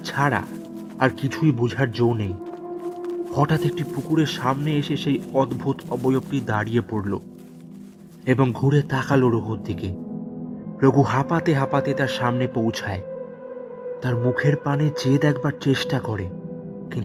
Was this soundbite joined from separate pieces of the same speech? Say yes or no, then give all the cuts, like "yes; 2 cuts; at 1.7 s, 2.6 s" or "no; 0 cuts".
no; 0 cuts